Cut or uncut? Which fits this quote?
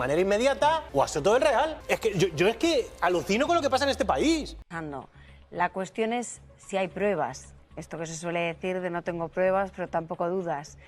cut